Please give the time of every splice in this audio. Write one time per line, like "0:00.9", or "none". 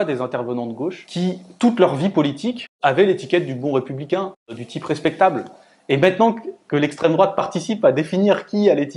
0:01.0
0:02.7
0:04.6